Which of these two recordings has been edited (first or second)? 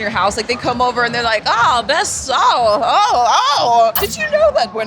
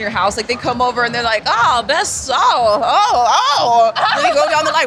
first